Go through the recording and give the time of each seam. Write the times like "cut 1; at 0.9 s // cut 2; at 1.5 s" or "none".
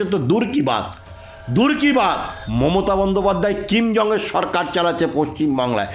cut 1; at 2.3 s